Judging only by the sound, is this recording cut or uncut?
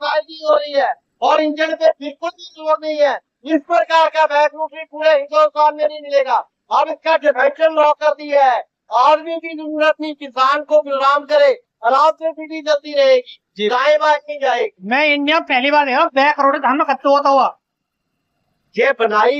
uncut